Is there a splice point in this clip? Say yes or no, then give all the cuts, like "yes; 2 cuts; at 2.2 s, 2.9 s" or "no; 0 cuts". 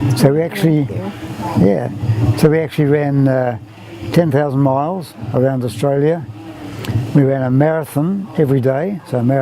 yes; 1 cut; at 2.7 s